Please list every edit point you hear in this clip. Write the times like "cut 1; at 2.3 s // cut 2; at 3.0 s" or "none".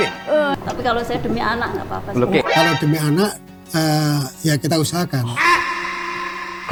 none